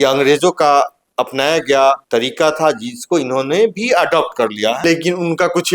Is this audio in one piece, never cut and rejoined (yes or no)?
no